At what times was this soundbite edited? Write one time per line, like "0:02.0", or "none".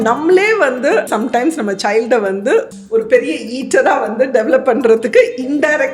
0:01.1
0:02.7